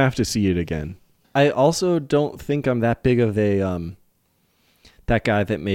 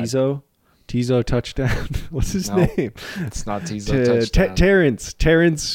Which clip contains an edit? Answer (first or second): first